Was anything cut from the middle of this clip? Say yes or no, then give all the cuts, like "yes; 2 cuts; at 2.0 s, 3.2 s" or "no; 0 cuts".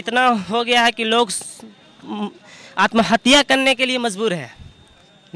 no; 0 cuts